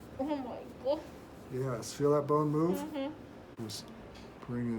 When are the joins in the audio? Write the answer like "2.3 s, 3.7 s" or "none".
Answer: 3.4 s